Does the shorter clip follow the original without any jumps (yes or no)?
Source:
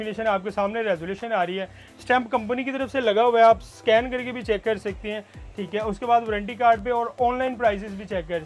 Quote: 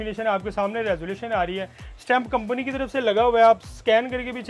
yes